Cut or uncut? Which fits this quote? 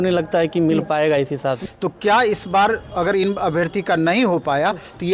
cut